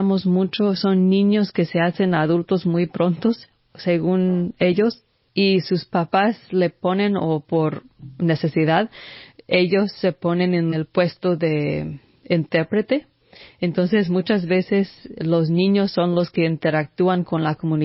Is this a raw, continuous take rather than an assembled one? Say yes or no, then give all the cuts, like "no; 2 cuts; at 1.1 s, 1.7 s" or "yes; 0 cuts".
no; 3 cuts; at 5.0 s, 6.1 s, 10.7 s